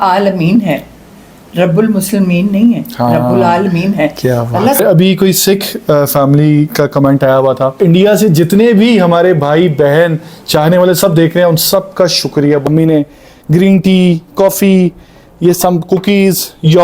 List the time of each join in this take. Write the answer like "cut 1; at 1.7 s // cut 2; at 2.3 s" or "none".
cut 1; at 4.8 s // cut 2; at 7.8 s // cut 3; at 12.6 s